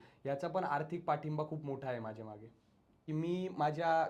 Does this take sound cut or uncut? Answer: cut